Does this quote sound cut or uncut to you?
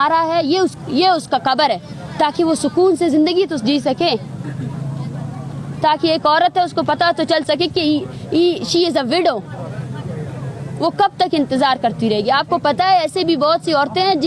uncut